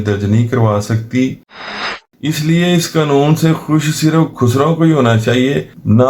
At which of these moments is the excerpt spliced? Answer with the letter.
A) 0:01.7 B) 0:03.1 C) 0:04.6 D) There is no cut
A